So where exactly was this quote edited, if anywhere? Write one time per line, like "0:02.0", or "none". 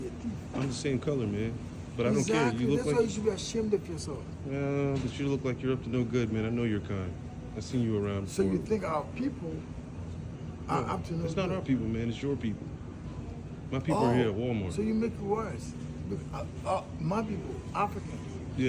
none